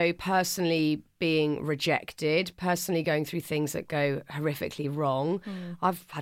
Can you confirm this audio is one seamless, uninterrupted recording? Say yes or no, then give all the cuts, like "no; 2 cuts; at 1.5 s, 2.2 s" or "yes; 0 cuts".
yes; 0 cuts